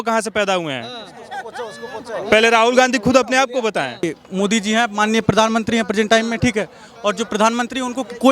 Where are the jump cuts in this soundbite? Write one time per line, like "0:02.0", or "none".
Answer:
0:04.0